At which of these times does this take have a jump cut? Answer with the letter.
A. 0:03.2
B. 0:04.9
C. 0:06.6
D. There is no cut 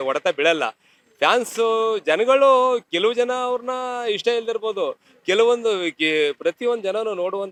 D